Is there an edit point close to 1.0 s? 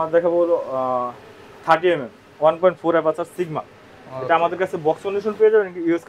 no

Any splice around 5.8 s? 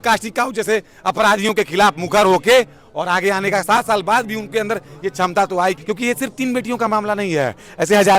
yes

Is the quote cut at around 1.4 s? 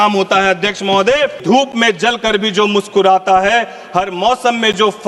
yes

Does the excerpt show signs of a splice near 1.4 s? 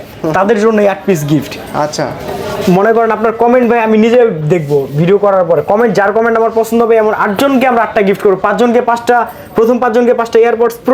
no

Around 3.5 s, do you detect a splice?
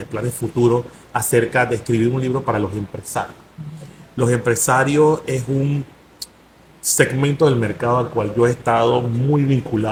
no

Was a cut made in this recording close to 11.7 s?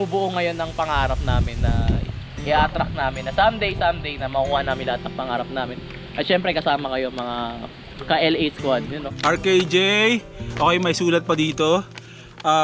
no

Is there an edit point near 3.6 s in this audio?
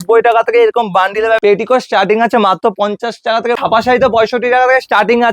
yes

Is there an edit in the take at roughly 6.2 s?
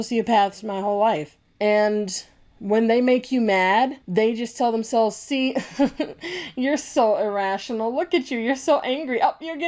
no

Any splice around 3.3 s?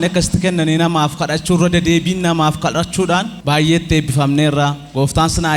yes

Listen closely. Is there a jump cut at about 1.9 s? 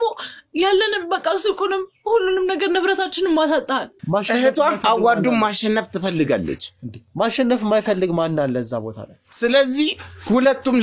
no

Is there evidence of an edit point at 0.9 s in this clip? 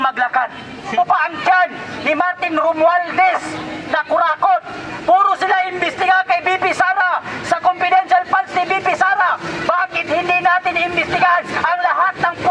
yes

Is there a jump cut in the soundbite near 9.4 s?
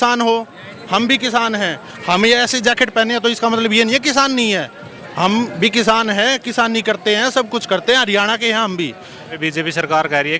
yes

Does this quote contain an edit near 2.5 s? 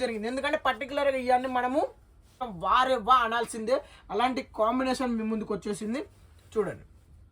yes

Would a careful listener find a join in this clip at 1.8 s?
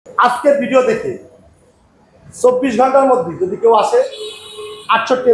no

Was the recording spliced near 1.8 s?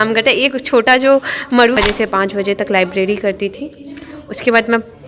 yes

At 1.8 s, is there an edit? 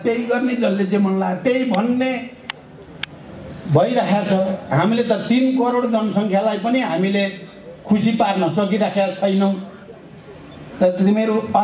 no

